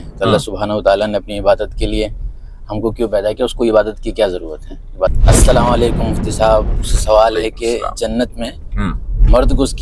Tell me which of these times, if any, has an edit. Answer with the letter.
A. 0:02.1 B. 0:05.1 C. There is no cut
B